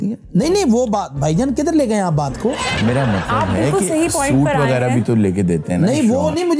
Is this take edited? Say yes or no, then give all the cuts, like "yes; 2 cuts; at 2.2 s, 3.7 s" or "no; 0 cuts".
no; 0 cuts